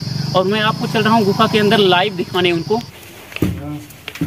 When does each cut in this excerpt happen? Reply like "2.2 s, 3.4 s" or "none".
3.0 s